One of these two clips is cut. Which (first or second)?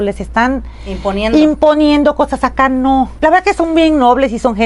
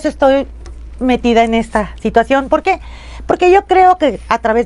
first